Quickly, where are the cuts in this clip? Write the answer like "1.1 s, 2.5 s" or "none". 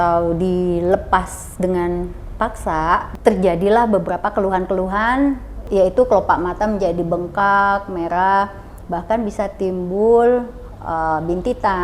3.2 s, 5.7 s